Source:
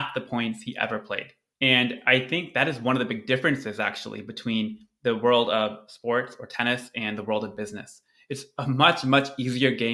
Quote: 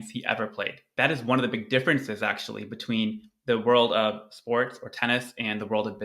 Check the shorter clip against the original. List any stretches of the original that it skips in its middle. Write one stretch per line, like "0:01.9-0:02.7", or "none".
0:01.4-0:02.5